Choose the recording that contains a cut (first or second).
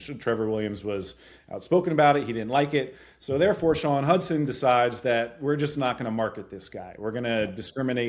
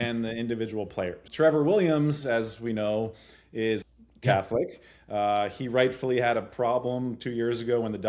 second